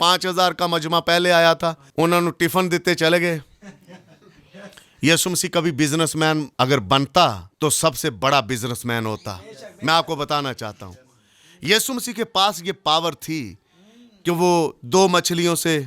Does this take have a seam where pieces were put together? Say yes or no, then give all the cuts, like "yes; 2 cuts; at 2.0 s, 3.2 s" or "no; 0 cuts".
yes; 3 cuts; at 1.8 s, 6.5 s, 7.5 s